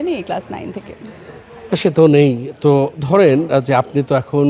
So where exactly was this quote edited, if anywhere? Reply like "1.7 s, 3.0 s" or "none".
none

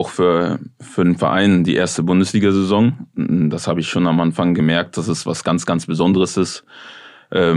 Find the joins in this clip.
none

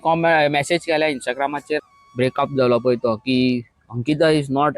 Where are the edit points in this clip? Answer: 1.8 s

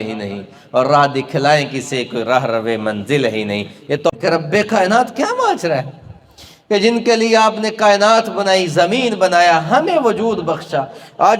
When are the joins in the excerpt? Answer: 4.1 s

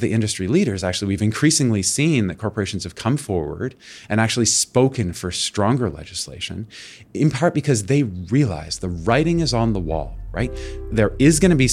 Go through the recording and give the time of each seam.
none

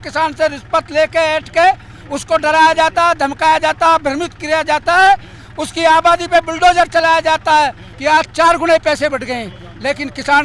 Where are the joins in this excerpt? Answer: 7.9 s

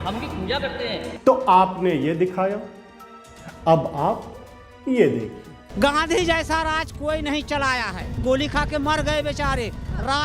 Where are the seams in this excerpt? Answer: 1.1 s, 5.6 s

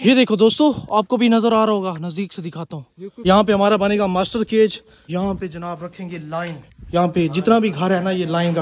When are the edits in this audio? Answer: 3.0 s, 4.9 s

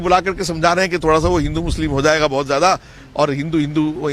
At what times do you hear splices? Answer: none

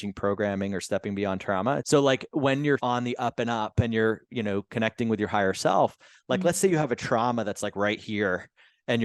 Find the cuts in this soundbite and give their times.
1.8 s, 2.8 s

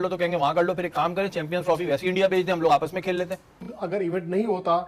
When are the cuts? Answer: 3.6 s

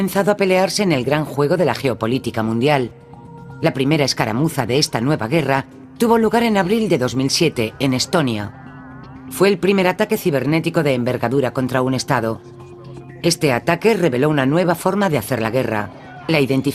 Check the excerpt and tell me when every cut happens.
none

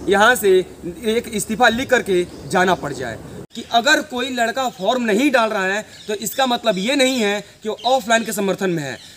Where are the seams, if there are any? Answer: 3.3 s

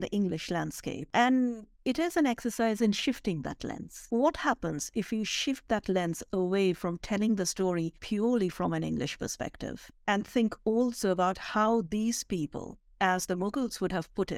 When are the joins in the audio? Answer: 1.0 s, 3.9 s, 8.0 s

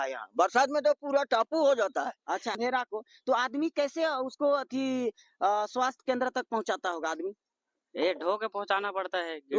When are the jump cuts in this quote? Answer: 2.3 s

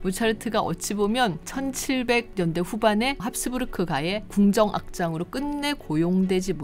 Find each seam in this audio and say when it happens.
none

